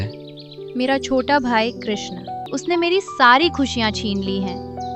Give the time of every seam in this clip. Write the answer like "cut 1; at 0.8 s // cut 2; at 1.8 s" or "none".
cut 1; at 2.4 s